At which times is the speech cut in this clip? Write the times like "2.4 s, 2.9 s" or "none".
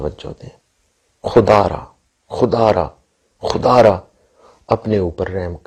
none